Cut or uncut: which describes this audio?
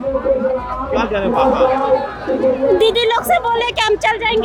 uncut